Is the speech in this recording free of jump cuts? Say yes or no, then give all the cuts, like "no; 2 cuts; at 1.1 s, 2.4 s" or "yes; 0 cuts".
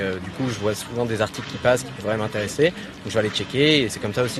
yes; 0 cuts